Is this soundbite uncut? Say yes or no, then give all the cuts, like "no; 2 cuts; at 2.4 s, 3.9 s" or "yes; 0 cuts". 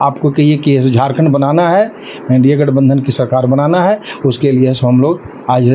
yes; 0 cuts